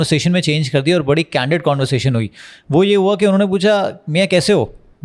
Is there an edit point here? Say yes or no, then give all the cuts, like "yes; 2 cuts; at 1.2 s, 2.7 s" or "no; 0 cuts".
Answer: no; 0 cuts